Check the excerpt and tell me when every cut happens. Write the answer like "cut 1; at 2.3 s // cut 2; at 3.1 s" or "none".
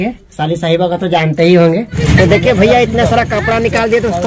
cut 1; at 1.9 s